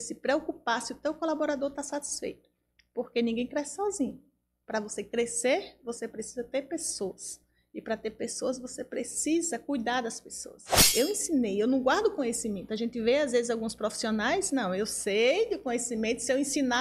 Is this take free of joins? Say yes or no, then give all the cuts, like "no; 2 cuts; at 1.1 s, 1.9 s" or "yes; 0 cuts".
no; 1 cut; at 10.8 s